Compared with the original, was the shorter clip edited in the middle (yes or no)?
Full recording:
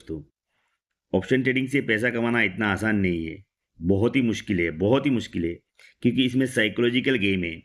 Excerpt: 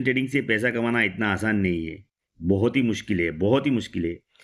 no